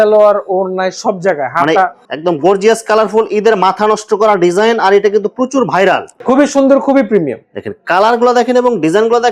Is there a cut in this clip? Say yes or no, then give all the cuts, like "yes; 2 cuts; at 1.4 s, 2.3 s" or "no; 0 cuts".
yes; 2 cuts; at 2.0 s, 6.2 s